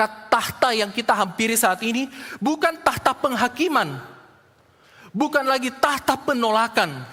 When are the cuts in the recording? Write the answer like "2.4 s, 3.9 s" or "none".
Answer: none